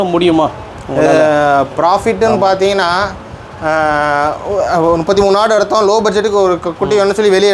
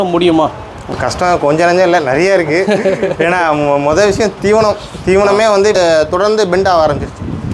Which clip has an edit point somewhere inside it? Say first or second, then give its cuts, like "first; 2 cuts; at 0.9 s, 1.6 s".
second; 2 cuts; at 1.0 s, 5.7 s